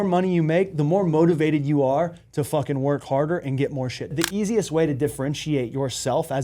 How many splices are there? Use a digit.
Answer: 1